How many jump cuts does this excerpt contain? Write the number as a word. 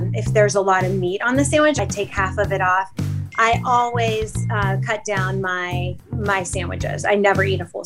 two